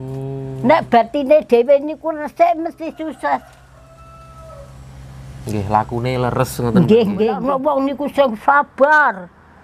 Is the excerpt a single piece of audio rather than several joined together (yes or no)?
no